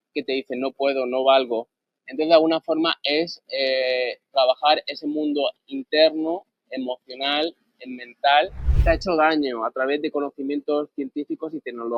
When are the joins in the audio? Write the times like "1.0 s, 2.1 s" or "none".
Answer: 8.6 s

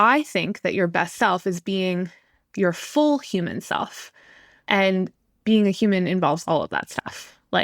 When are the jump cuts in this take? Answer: 4.1 s, 5.2 s

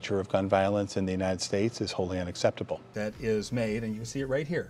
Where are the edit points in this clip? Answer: 2.9 s

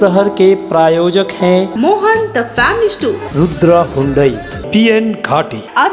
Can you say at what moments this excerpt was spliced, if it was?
none

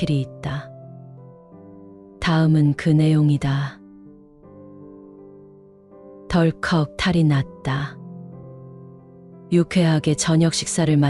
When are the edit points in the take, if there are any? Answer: 4.1 s, 5.6 s

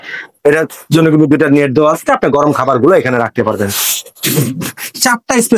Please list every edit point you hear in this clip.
none

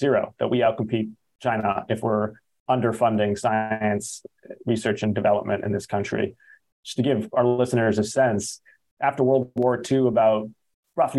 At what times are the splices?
none

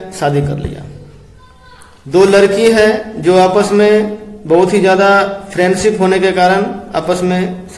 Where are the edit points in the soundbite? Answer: none

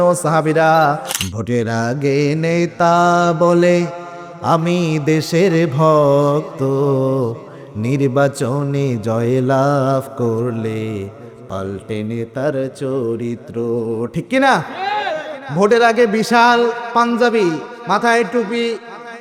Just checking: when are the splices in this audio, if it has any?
1.1 s

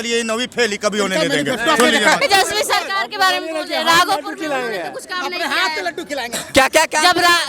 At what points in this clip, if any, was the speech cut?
2.2 s

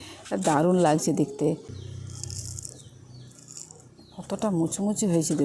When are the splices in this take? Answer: 1.4 s

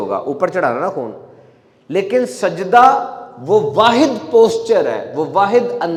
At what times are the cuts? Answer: none

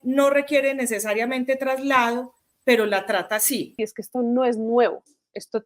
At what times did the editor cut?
3.8 s

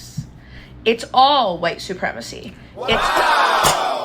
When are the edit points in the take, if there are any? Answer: 2.9 s

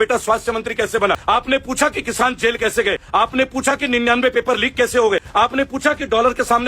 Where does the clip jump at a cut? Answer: 1.2 s, 3.0 s, 5.3 s

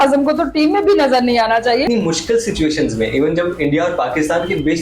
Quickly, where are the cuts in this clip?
1.8 s

